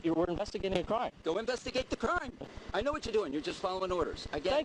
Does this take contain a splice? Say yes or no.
yes